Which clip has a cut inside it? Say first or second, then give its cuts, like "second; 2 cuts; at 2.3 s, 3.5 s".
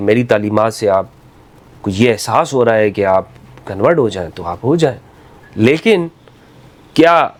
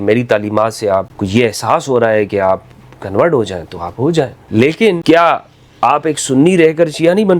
second; 3 cuts; at 1.2 s, 4.4 s, 5.0 s